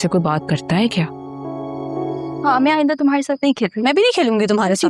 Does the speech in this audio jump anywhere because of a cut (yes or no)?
yes